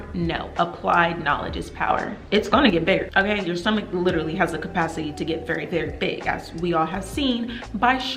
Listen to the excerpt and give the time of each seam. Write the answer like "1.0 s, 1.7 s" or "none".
2.1 s, 3.1 s